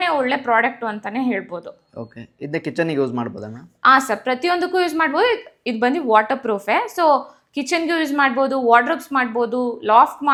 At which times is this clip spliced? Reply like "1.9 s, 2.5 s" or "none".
none